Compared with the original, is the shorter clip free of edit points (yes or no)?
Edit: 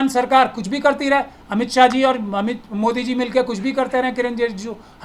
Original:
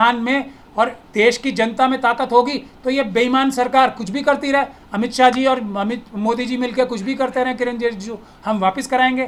yes